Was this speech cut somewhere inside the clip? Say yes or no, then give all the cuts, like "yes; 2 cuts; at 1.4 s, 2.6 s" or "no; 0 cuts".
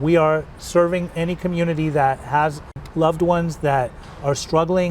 yes; 1 cut; at 2.8 s